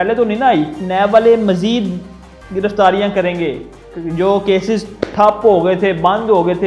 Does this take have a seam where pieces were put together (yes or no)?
no